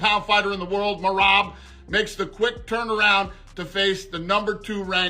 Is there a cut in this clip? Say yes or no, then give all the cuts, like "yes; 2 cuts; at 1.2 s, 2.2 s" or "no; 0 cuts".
no; 0 cuts